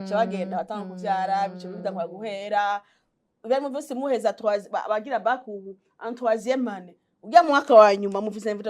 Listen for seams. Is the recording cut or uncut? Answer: uncut